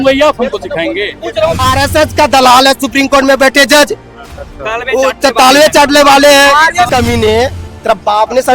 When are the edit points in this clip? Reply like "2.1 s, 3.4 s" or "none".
1.6 s, 6.9 s